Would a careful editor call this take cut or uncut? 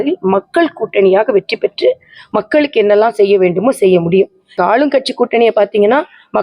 cut